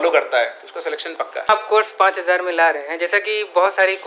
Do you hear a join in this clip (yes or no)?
yes